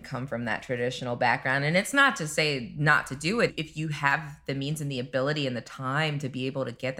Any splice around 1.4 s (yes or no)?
no